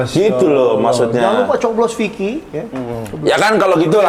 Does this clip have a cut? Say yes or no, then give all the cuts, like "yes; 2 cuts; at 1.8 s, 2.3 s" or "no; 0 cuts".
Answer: no; 0 cuts